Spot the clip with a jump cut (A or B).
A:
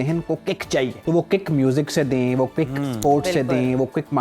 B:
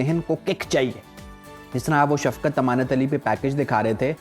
A